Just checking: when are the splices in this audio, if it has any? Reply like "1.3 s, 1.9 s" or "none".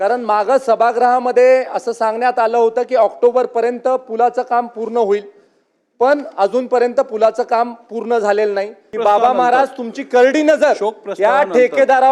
8.9 s